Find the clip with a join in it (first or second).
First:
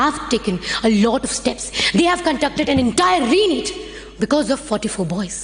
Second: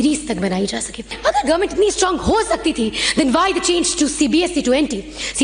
second